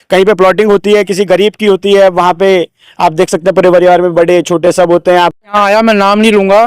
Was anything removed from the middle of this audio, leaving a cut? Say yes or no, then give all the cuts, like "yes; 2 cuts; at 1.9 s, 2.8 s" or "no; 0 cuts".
yes; 1 cut; at 5.4 s